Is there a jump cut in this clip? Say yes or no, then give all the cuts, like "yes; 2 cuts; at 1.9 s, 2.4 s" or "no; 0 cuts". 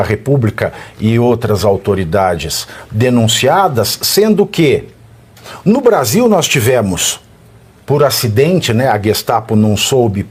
no; 0 cuts